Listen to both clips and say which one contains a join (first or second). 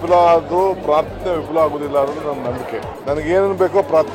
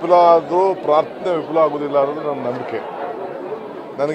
first